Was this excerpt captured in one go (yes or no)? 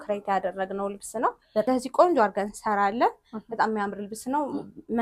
no